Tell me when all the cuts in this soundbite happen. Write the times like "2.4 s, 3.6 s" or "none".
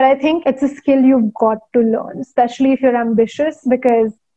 none